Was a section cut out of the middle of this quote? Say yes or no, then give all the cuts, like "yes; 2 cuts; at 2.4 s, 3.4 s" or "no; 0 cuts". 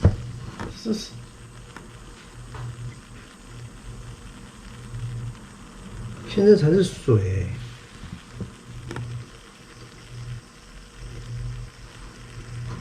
yes; 1 cut; at 8.8 s